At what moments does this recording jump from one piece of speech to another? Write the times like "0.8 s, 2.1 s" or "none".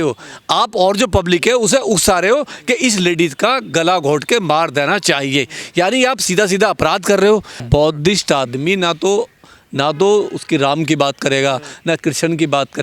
7.6 s